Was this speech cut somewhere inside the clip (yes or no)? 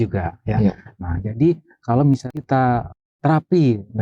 yes